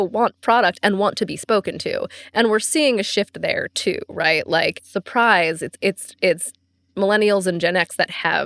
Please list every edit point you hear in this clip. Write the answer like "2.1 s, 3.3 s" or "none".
4.8 s